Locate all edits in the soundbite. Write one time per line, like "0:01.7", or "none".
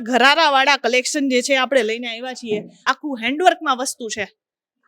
0:02.7